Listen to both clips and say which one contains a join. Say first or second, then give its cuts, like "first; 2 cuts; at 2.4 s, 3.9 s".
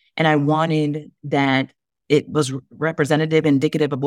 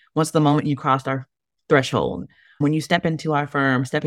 second; 1 cut; at 2.6 s